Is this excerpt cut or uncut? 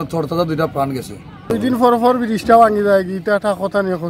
cut